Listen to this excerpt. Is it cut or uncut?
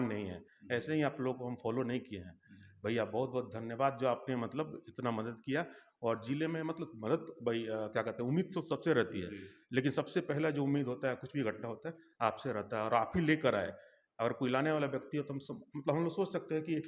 uncut